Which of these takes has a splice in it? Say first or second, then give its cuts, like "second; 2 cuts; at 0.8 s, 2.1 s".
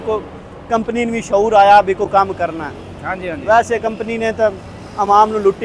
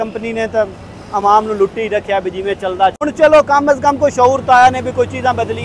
second; 1 cut; at 3.0 s